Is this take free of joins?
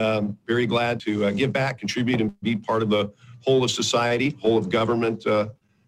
no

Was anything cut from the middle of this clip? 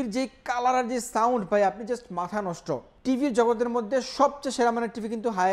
yes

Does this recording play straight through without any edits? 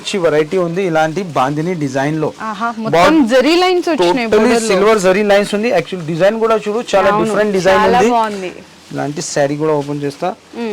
yes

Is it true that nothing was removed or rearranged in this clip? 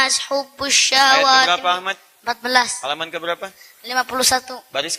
yes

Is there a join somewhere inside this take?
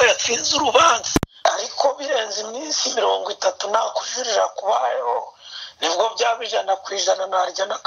yes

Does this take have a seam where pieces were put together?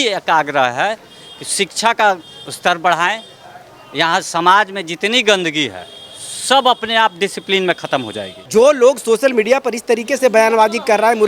yes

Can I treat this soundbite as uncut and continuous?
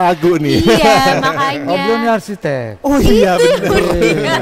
yes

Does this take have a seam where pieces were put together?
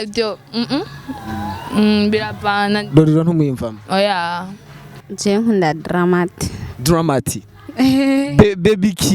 yes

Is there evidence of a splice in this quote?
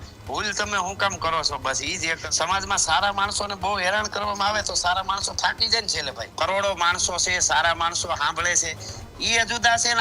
yes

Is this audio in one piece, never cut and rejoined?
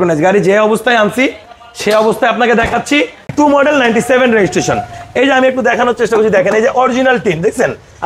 no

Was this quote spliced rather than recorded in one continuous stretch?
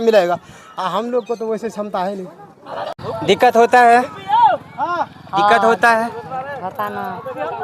yes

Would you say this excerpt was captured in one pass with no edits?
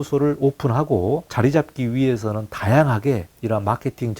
no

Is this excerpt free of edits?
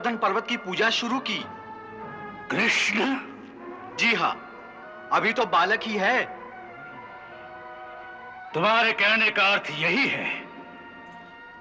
yes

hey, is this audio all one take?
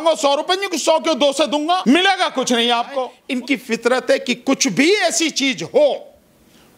no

